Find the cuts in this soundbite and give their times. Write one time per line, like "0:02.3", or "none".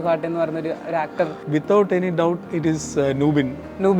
0:01.4
0:02.5